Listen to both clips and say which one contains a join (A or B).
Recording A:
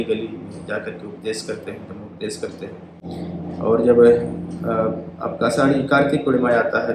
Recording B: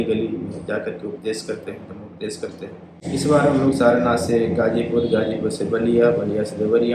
B